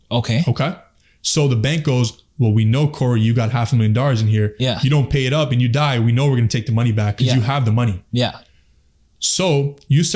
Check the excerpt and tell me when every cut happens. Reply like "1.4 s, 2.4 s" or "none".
none